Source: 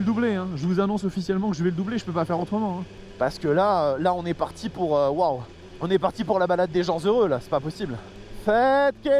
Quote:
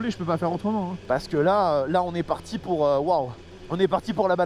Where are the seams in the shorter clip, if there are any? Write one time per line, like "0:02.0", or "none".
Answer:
0:01.0

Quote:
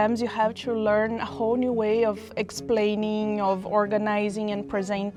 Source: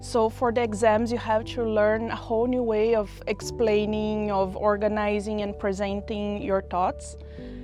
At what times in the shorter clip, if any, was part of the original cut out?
none

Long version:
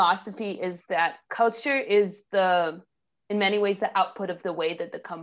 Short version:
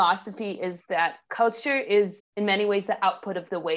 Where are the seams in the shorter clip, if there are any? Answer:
0:02.2

